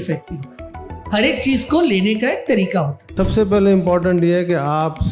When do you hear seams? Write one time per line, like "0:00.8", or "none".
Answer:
0:03.1